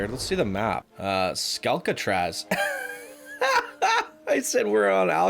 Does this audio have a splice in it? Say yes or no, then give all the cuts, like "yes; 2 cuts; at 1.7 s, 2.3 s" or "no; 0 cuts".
yes; 1 cut; at 0.9 s